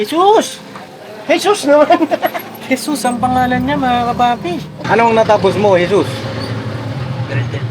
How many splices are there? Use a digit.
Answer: 1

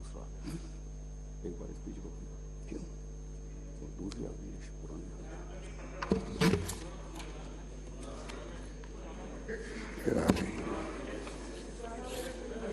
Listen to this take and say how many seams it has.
1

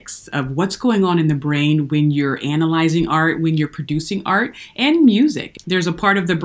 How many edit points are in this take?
1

